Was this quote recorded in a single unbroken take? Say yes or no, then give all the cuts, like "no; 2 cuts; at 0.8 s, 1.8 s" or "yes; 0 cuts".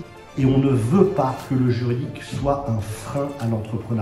yes; 0 cuts